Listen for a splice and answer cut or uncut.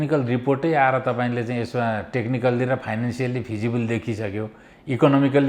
uncut